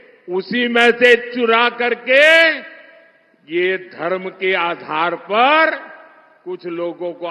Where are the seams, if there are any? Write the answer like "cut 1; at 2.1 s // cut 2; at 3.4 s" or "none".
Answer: none